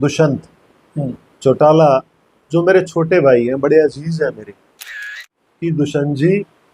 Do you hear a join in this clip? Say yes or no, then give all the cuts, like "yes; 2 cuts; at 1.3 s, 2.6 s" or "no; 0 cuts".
yes; 1 cut; at 5.0 s